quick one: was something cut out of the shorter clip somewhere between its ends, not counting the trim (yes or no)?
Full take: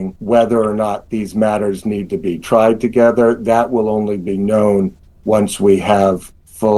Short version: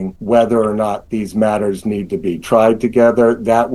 no